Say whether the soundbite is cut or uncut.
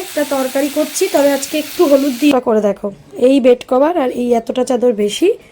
cut